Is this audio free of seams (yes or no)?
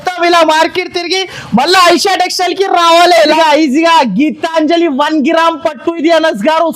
no